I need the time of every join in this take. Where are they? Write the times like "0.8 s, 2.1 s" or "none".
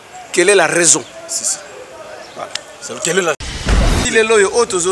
4.0 s